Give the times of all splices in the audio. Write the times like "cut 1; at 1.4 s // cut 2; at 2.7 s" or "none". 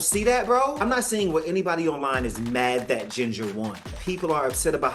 cut 1; at 0.8 s // cut 2; at 4.0 s